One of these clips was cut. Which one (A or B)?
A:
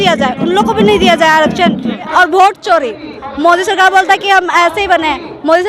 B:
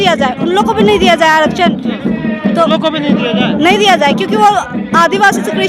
A